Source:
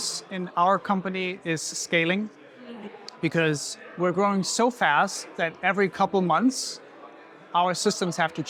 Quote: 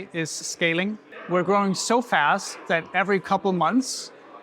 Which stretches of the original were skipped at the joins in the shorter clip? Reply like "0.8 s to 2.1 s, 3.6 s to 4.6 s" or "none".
2.4 s to 3.8 s